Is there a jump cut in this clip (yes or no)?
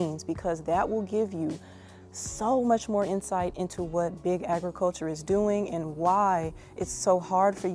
no